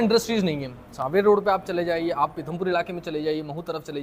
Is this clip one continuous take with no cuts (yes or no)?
yes